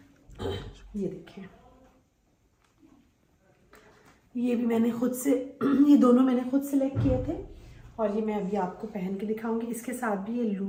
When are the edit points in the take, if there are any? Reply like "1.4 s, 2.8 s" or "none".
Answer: none